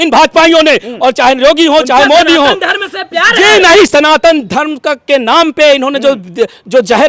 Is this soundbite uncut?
yes; 0 cuts

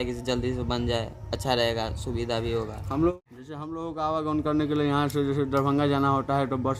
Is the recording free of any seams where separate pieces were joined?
no; 1 cut; at 3.1 s

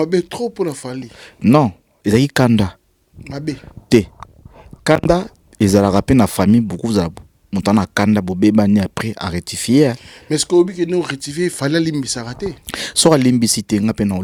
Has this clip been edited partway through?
no; 0 cuts

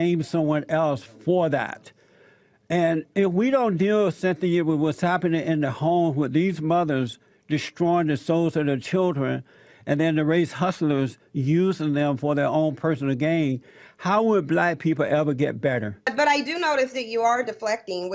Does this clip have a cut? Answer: yes; 1 cut; at 16.1 s

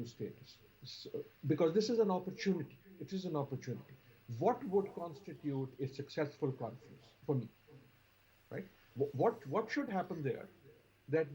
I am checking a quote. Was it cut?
no; 0 cuts

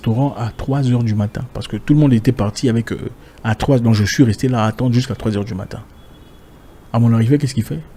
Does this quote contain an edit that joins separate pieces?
no; 0 cuts

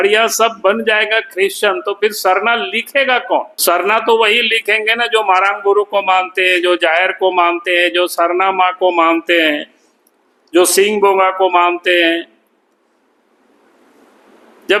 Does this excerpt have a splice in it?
no; 0 cuts

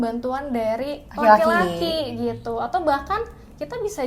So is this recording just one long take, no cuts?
yes; 0 cuts

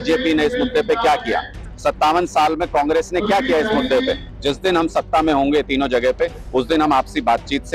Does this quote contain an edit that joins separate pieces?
yes; 2 cuts; at 1.6 s, 4.3 s

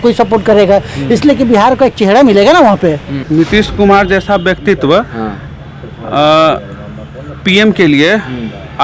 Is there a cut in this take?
yes; 1 cut; at 3.1 s

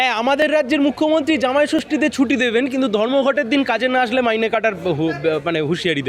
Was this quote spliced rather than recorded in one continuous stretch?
no; 0 cuts

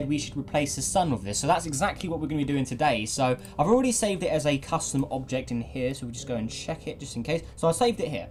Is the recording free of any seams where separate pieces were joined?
yes; 0 cuts

